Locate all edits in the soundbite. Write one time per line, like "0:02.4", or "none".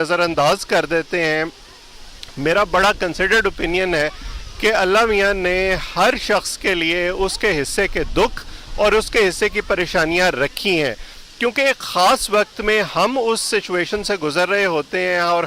none